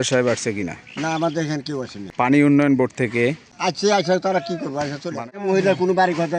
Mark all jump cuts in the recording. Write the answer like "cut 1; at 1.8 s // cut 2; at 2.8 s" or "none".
cut 1; at 2.0 s // cut 2; at 3.5 s // cut 3; at 5.2 s